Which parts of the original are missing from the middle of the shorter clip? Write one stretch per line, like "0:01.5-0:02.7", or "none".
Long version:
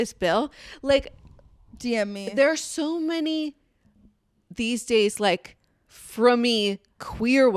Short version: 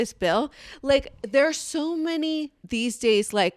0:01.2-0:02.2
0:03.6-0:04.4